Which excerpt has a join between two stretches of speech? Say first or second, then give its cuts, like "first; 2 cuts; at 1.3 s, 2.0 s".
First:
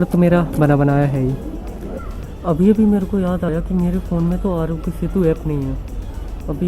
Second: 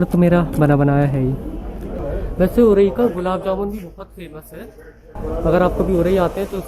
second; 1 cut; at 2.0 s